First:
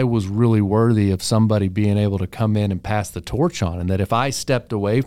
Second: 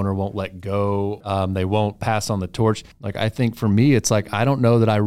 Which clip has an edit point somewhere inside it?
second; 2 cuts; at 1.3 s, 3.0 s

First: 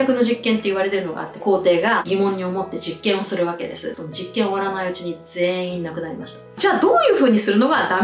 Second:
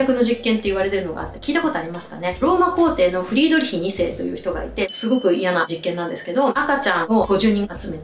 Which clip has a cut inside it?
first; 3 cuts; at 1.4 s, 3.9 s, 6.5 s

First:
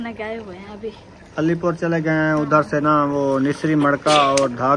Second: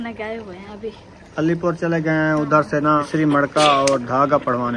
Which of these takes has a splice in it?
second; 1 cut; at 3.1 s

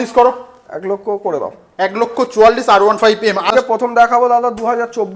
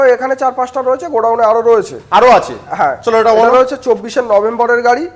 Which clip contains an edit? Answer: first; 1 cut; at 3.5 s

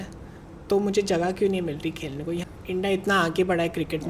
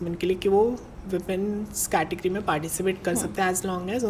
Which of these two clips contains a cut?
first; 1 cut; at 2.5 s

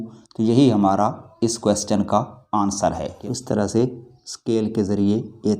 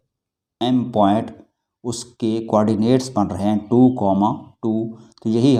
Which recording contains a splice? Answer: first; 1 cut; at 3.1 s

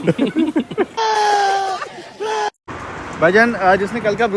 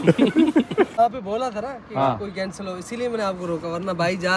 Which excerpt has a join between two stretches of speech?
second; 1 cut; at 1.0 s

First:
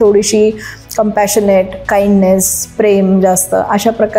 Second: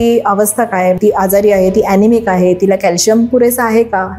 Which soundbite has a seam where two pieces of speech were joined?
second; 1 cut; at 1.0 s

